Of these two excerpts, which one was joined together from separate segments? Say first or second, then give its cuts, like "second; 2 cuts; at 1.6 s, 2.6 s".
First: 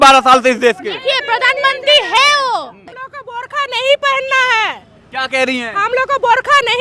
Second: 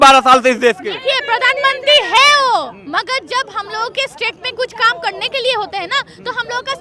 first; 1 cut; at 2.8 s